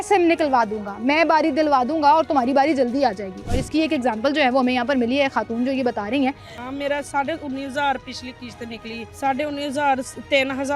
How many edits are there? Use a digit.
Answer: 2